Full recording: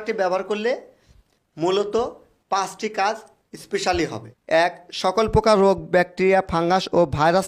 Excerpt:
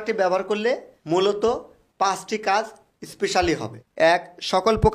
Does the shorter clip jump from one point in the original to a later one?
yes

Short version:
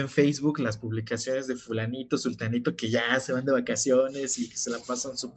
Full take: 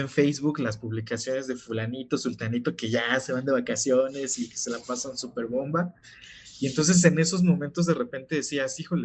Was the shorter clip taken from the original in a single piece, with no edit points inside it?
yes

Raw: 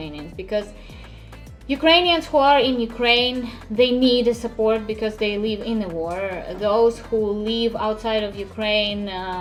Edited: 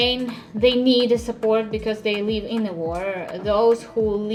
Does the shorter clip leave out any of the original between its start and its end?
no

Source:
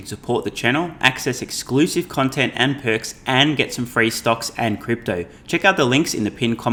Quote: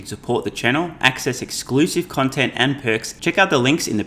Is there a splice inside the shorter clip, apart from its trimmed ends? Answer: yes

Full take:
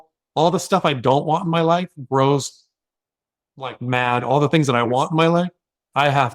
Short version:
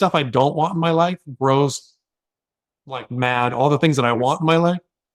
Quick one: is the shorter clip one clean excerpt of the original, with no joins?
yes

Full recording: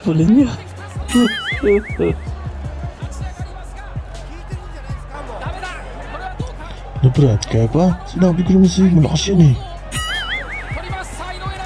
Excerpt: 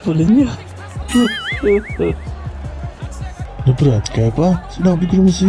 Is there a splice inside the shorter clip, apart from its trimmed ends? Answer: yes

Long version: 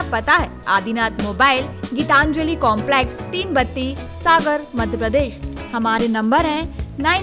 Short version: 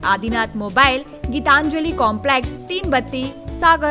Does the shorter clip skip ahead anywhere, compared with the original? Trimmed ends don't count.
no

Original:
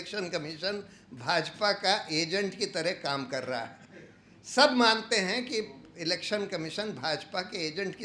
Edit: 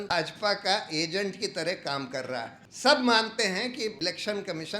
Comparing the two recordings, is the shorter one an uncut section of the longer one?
no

